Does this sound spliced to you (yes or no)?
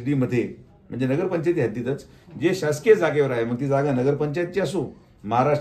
no